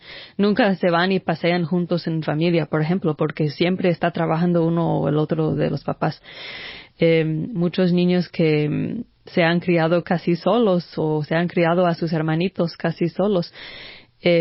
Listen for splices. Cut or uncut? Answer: uncut